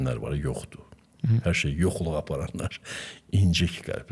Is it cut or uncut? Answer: uncut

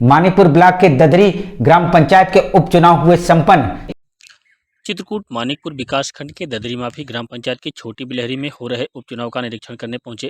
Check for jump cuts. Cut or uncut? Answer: uncut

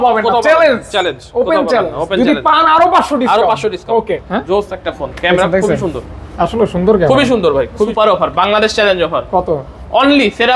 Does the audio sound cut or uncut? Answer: cut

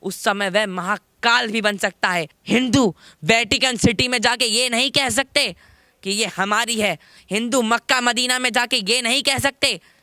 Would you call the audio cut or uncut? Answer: cut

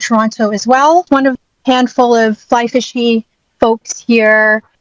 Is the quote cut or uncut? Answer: cut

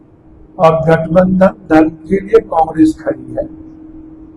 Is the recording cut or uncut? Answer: uncut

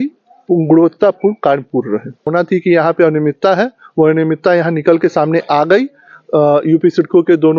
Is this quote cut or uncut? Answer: cut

